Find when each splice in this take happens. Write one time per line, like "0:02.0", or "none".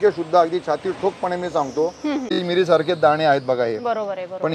0:02.4